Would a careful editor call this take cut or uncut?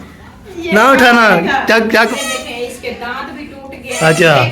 cut